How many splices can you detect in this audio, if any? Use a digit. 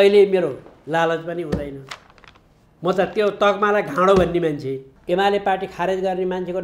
1